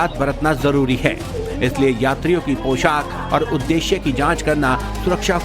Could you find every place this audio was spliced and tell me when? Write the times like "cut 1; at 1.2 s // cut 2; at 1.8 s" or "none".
cut 1; at 3.8 s